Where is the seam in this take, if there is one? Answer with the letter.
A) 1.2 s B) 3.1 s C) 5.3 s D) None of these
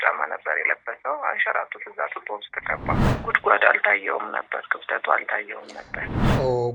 B